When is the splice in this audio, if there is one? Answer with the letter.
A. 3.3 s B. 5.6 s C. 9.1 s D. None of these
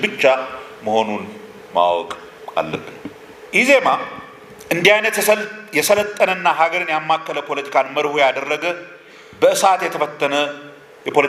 A